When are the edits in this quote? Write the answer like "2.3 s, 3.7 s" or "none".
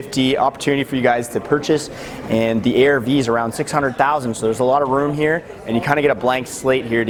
none

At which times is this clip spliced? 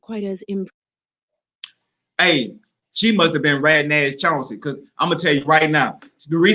none

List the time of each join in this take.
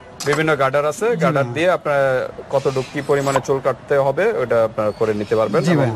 none

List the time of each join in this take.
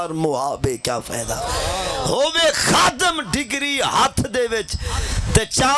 none

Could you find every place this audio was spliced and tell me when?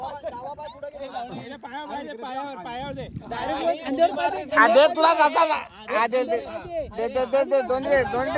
none

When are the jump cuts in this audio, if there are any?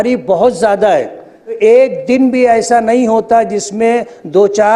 1.6 s

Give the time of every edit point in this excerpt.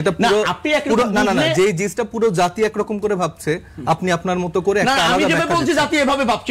none

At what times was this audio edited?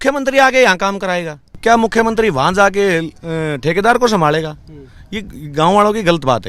1.6 s

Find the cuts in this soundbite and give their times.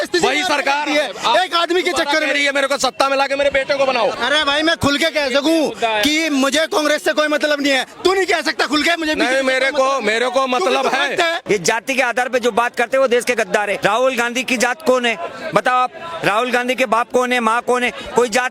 4.2 s, 11.4 s, 13.8 s

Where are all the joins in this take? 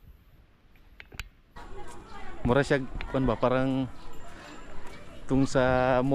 1.6 s

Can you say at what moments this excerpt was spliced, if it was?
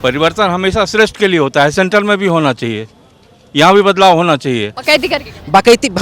4.7 s

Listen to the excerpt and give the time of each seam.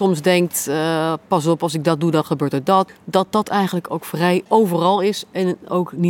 2.9 s, 4.5 s

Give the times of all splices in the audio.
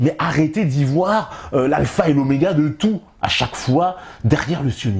none

